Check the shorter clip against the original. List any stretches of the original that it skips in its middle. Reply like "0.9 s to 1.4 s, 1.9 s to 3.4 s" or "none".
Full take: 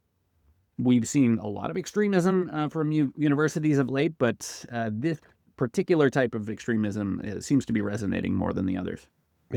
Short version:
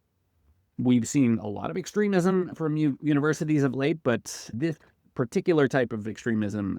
2.5 s to 2.7 s, 4.7 s to 4.9 s